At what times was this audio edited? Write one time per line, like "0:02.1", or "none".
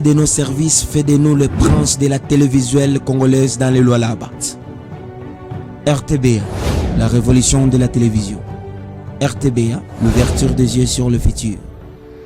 0:04.5
0:09.9